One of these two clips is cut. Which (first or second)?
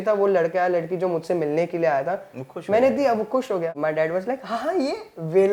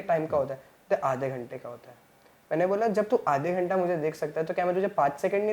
first